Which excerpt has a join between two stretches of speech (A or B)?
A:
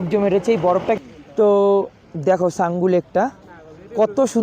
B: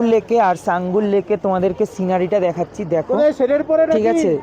A